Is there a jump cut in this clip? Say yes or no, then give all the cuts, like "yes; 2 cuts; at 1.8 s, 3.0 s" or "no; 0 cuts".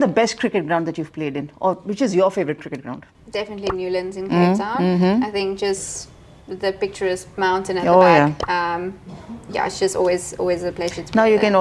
no; 0 cuts